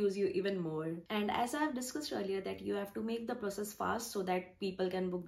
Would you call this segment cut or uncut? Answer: cut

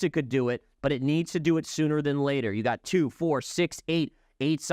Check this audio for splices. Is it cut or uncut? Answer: uncut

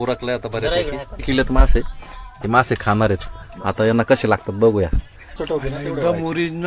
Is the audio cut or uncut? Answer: cut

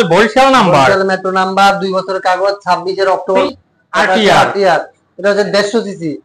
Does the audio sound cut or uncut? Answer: cut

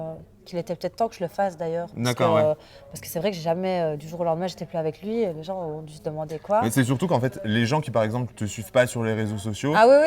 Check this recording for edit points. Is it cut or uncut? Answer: uncut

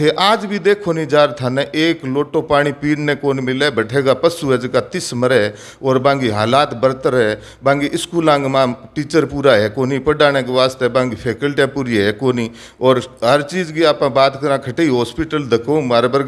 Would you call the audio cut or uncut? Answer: uncut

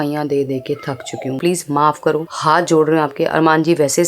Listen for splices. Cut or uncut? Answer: cut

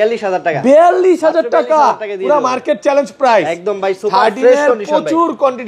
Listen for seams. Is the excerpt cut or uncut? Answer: uncut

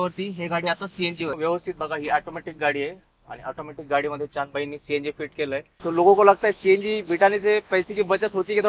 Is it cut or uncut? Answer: cut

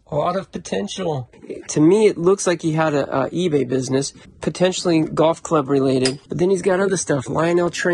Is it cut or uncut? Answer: uncut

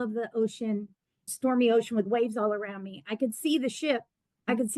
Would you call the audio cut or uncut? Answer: cut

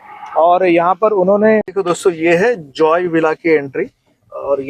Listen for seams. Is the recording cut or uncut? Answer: cut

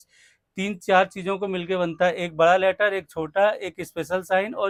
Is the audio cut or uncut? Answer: uncut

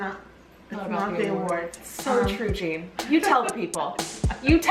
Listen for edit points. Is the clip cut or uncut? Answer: uncut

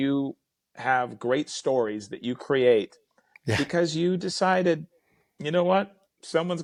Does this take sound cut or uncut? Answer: uncut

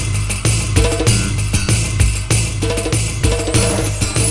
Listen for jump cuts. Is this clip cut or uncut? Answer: uncut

